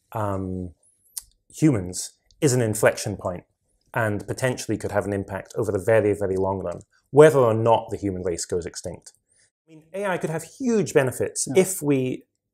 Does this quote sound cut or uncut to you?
cut